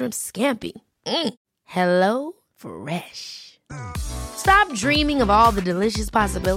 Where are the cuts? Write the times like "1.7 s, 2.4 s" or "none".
none